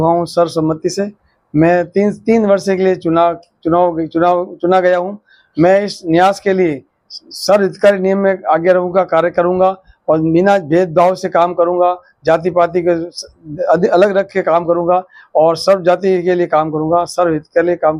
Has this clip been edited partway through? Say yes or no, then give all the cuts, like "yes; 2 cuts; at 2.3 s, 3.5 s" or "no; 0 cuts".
no; 0 cuts